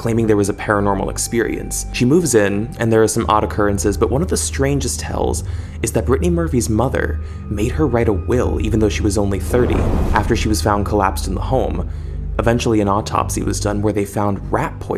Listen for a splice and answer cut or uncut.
uncut